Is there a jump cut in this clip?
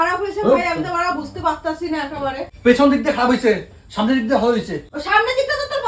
yes; 2 cuts; at 2.5 s, 4.8 s

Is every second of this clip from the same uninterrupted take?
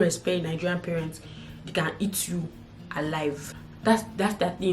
no; 1 cut; at 3.4 s

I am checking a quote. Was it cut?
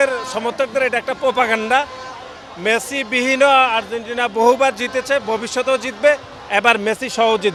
no; 0 cuts

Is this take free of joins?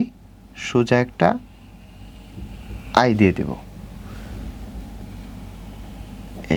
yes; 0 cuts

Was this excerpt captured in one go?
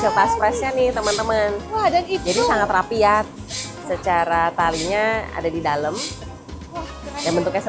yes; 0 cuts

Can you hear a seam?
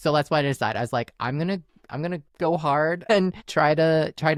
no; 0 cuts

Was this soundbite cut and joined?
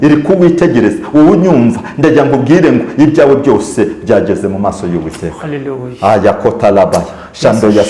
no; 0 cuts

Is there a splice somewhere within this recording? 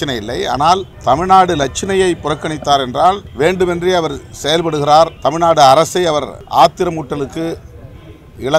yes; 4 cuts; at 0.9 s, 3.3 s, 5.1 s, 6.4 s

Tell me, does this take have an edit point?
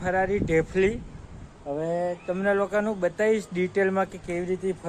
no; 0 cuts

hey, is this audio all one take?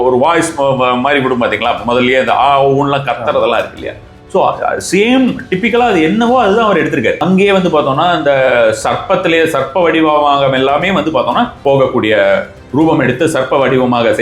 no; 2 cuts; at 7.2 s, 11.6 s

